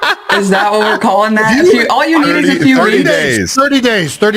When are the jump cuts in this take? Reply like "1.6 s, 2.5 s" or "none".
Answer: none